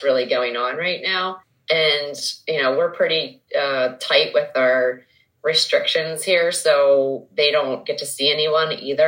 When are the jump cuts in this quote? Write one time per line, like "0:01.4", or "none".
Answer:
0:01.5

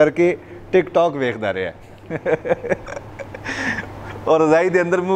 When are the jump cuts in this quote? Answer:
none

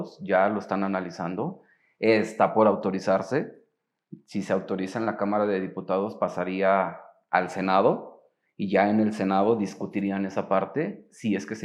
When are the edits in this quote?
none

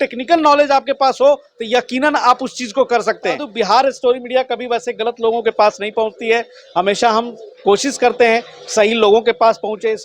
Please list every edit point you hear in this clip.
0:03.5

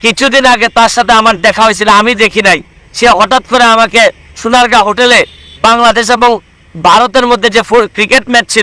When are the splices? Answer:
none

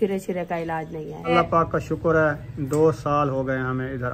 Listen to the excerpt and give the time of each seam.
0:01.3

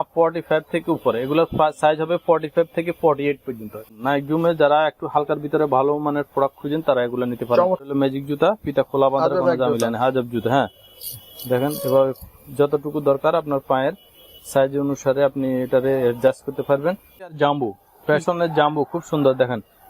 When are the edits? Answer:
0:03.9
0:07.8
0:17.3

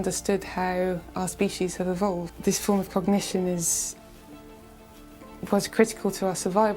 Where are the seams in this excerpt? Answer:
0:02.3

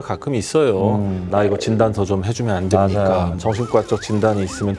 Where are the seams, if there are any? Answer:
0:01.2
0:03.4

